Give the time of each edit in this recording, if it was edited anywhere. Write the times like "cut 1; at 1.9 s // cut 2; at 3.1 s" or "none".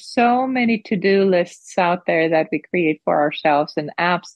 none